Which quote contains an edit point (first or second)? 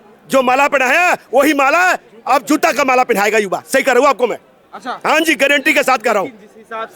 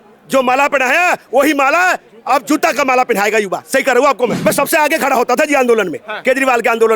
second